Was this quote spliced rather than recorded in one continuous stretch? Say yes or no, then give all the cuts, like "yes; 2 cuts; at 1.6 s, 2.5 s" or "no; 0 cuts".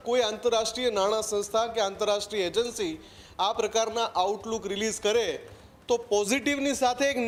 no; 0 cuts